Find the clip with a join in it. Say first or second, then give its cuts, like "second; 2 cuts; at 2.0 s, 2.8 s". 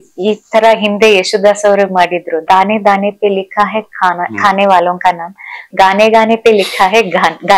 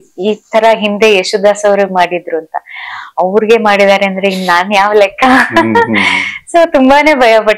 first; 2 cuts; at 2.4 s, 5.7 s